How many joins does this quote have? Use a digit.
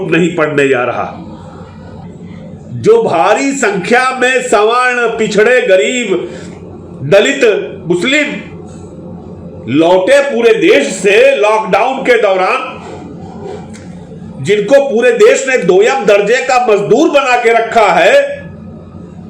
1